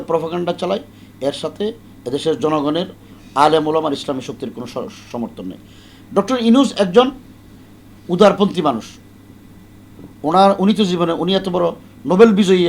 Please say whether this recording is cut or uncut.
uncut